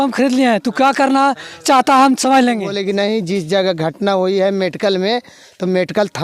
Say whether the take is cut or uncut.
cut